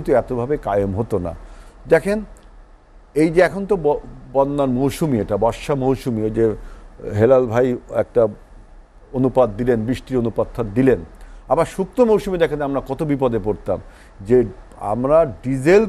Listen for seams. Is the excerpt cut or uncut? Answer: uncut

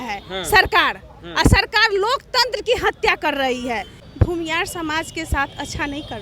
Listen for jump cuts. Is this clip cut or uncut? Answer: cut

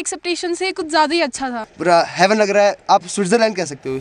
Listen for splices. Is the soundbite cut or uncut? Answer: cut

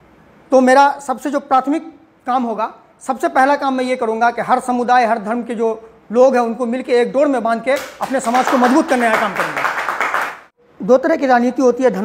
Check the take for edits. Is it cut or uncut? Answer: cut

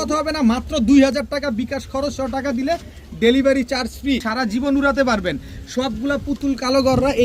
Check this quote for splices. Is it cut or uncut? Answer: cut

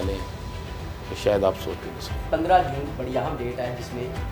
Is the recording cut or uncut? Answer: cut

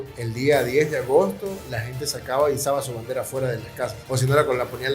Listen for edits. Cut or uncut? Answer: cut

